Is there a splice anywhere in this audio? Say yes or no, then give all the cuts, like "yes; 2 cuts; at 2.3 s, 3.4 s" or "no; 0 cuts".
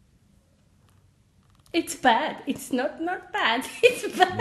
yes; 1 cut; at 1.4 s